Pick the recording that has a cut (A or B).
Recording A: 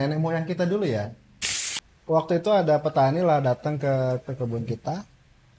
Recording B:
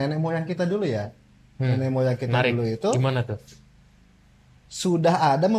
A